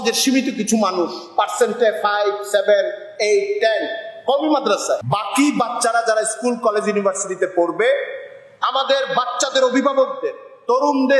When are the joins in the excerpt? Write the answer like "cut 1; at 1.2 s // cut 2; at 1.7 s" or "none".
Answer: none